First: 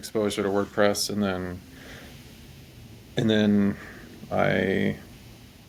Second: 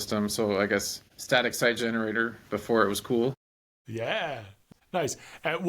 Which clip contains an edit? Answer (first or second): second